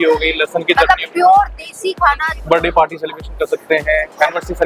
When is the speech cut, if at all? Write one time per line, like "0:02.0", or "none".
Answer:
0:02.3